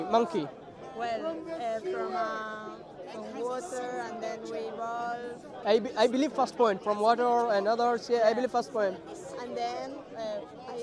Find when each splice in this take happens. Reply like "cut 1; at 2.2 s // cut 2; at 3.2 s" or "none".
cut 1; at 5.6 s